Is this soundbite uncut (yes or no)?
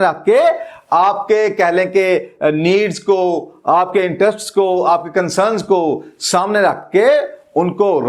yes